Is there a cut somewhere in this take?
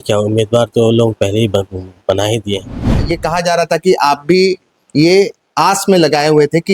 yes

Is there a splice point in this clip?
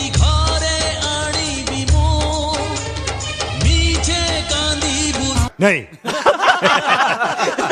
yes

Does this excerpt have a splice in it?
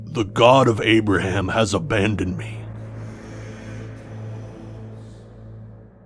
yes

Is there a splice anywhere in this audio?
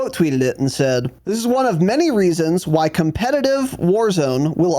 yes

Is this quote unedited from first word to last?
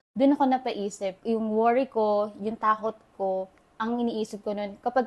no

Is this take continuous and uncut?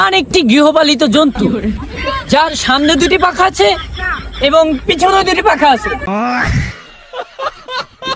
no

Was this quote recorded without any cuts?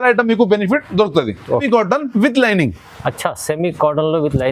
no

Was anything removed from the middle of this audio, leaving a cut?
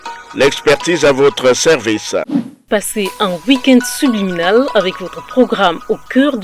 yes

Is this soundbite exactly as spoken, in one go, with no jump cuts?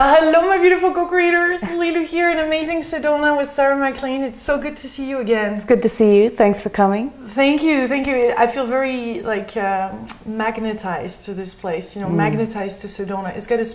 yes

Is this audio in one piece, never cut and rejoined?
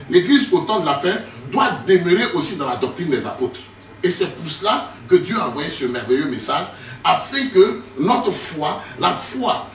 yes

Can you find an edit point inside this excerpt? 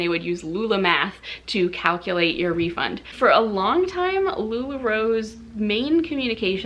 yes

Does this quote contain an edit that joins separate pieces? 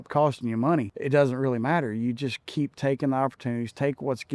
yes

